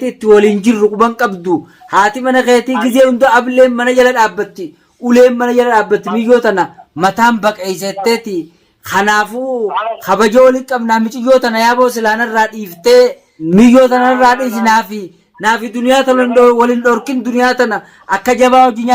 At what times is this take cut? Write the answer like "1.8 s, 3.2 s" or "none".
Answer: 13.3 s